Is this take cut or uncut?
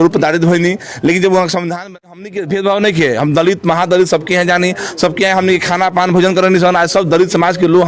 cut